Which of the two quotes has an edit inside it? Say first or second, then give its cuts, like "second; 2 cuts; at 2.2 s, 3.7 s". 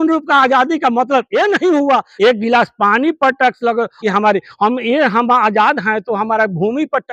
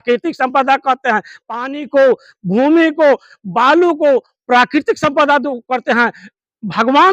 first; 2 cuts; at 2.1 s, 3.9 s